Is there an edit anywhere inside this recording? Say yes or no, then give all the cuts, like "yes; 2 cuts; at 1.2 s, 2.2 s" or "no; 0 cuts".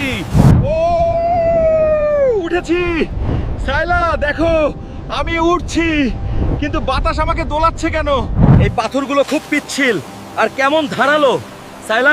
yes; 1 cut; at 8.4 s